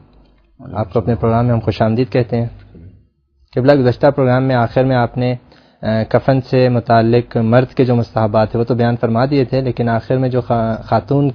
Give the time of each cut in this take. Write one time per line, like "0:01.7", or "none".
0:06.3